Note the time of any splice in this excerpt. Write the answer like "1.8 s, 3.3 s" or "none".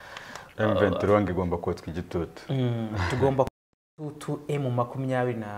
none